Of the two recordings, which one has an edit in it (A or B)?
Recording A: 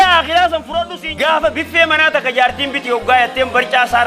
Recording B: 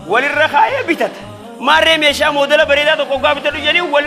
A